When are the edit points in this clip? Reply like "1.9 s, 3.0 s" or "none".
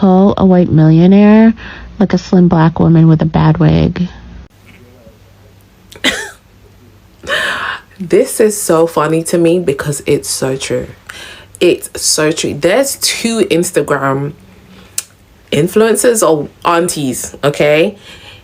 none